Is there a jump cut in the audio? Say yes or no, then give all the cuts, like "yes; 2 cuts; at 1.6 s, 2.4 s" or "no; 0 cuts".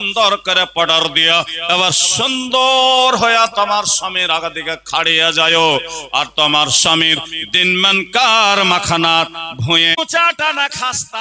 yes; 1 cut; at 10.0 s